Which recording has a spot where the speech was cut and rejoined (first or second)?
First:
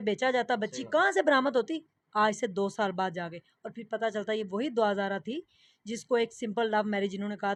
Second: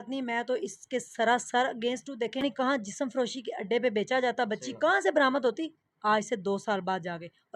second